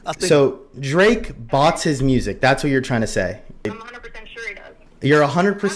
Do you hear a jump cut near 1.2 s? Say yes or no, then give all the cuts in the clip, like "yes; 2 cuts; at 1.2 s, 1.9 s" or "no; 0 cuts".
no; 1 cut; at 3.7 s